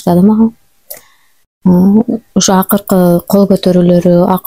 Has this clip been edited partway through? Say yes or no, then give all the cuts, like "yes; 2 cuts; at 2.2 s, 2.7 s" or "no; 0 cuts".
no; 0 cuts